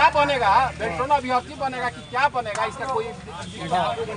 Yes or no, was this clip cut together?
no